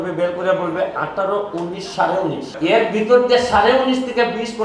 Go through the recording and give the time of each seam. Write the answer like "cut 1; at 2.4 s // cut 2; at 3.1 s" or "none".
cut 1; at 2.5 s